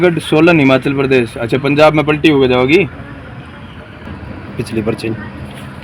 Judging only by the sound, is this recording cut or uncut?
uncut